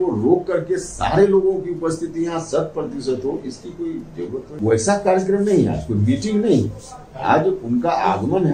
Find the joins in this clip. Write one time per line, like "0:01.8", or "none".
0:04.5